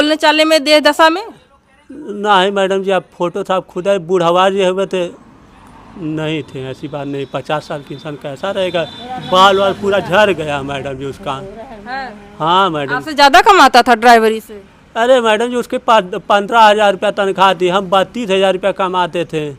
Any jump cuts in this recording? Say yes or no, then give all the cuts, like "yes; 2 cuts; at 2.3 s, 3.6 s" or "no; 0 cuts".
no; 0 cuts